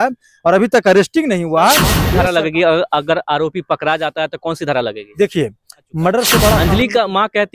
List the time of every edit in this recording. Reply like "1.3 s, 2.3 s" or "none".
1.9 s, 6.6 s